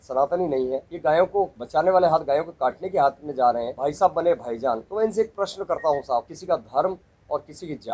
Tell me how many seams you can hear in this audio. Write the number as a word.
five